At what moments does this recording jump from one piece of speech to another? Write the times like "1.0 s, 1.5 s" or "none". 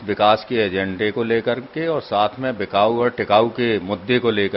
none